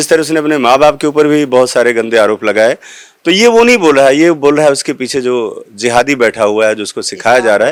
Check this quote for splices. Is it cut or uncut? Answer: uncut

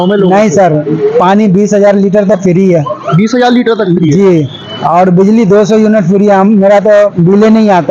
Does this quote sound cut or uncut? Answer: uncut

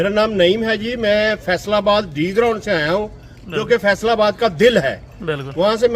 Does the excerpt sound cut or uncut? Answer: uncut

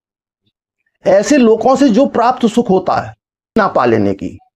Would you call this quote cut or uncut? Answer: cut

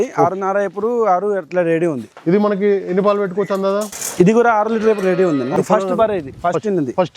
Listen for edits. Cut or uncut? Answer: cut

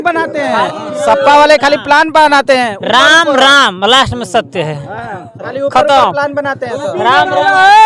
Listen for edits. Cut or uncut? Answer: uncut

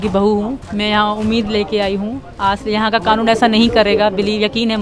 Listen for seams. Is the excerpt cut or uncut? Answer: uncut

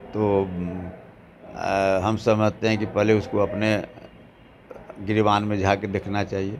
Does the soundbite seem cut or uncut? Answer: uncut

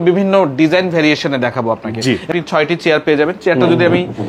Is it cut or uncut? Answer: cut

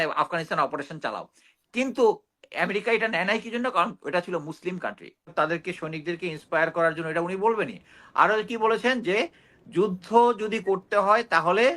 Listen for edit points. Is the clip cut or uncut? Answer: cut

